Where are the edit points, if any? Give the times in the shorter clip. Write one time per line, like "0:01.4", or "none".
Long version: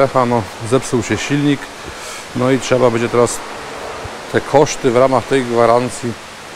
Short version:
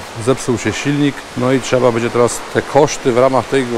0:01.3
0:02.4